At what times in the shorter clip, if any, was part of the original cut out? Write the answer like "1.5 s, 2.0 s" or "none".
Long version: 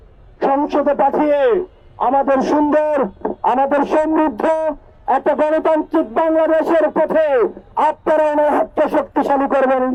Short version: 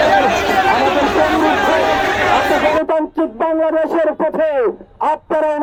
none